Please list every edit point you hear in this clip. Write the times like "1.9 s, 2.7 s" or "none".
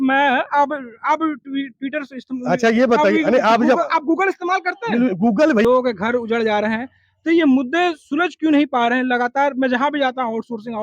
5.6 s